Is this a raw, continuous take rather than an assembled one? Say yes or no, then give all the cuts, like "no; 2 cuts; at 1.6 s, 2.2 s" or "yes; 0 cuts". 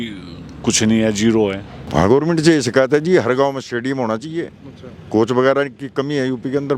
no; 1 cut; at 1.7 s